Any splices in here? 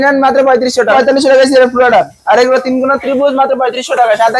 yes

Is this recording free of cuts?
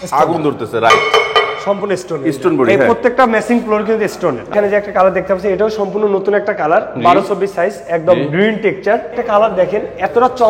no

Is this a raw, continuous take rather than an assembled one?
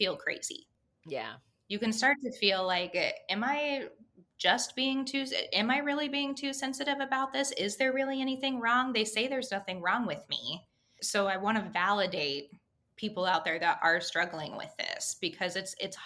yes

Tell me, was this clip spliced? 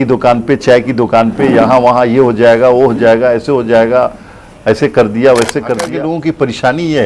yes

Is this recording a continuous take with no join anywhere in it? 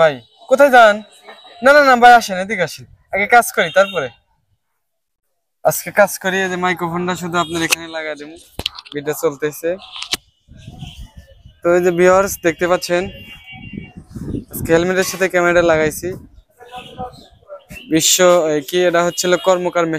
yes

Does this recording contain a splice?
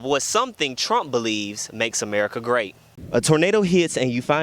yes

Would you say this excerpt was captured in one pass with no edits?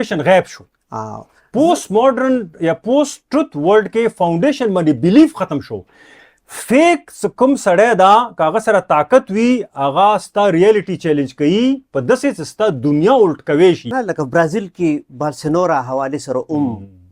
no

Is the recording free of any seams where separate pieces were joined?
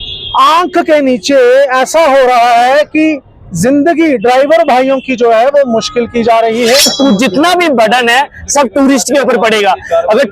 no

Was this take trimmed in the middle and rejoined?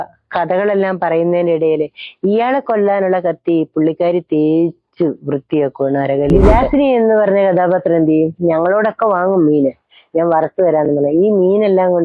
yes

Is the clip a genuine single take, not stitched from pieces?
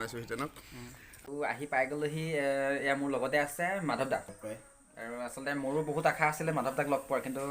no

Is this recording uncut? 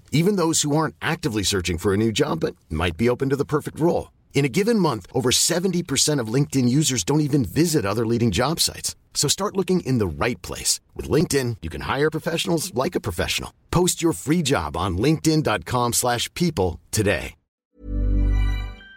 no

